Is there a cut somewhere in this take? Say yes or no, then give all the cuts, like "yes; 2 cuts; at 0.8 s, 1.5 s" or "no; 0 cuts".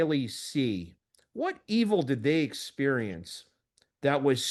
no; 0 cuts